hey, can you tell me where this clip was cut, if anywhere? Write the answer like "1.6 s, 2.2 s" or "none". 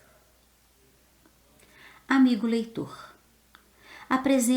1.0 s